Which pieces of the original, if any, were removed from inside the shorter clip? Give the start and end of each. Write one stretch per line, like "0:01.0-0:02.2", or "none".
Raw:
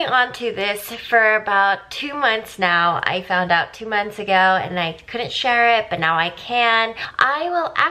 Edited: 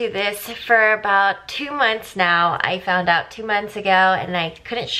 none